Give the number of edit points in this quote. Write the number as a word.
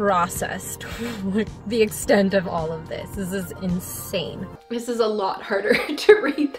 one